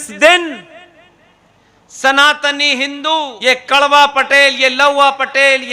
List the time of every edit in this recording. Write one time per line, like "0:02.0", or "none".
0:03.3